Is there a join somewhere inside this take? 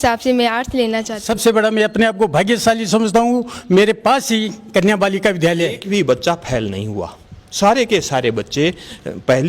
yes; 2 cuts; at 1.2 s, 5.8 s

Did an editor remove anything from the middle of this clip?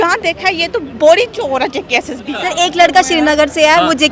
yes; 1 cut; at 2.4 s

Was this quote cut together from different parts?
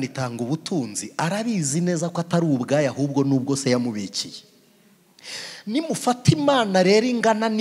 no; 0 cuts

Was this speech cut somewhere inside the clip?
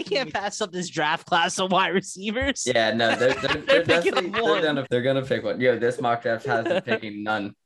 yes; 1 cut; at 4.8 s

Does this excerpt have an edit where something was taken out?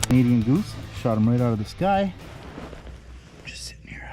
yes; 1 cut; at 2.3 s

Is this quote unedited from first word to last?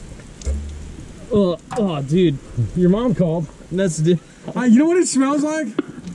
no; 1 cut; at 4.4 s

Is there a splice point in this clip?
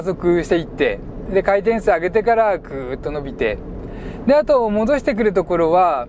no; 0 cuts

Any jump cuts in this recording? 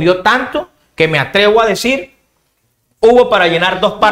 no; 0 cuts

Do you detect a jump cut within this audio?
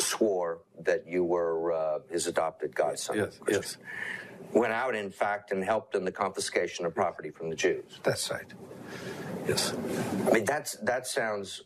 no; 0 cuts

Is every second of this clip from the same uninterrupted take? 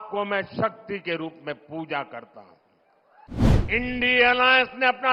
no; 1 cut; at 3.4 s

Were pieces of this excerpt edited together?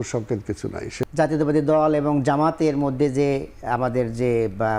yes; 1 cut; at 0.9 s

